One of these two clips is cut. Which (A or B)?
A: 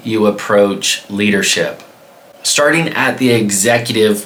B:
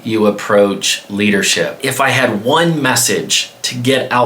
B